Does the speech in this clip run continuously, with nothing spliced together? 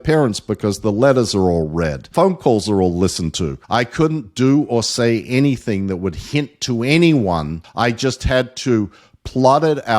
no; 3 cuts; at 2.0 s, 3.5 s, 7.6 s

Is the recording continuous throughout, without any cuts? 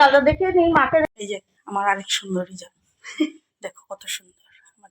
no; 1 cut; at 1.1 s

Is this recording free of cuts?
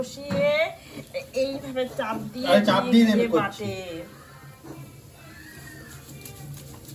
yes; 0 cuts

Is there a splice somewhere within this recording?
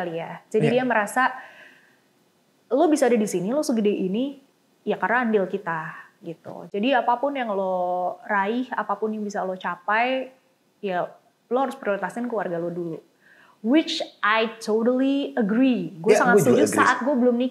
no; 0 cuts

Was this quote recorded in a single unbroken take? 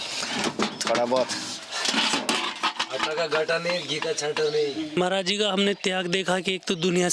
no; 1 cut; at 5.0 s

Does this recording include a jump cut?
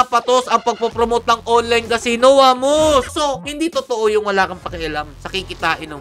yes; 1 cut; at 3.1 s

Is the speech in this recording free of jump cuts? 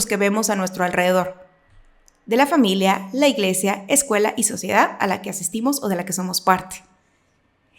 yes; 0 cuts

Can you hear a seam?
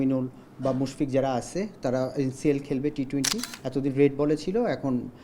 yes; 1 cut; at 3.5 s

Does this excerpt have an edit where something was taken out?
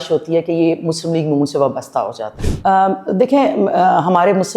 yes; 1 cut; at 2.4 s

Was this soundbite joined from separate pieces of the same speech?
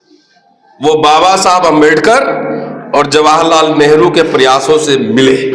no; 0 cuts

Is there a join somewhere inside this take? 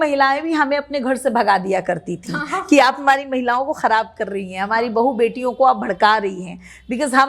no; 0 cuts

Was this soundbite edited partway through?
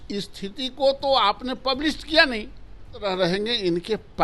yes; 1 cut; at 3.0 s

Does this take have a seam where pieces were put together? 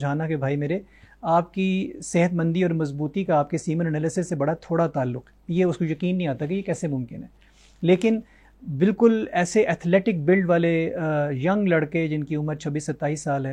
no; 0 cuts

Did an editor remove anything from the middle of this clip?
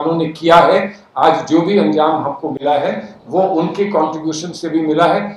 no; 0 cuts

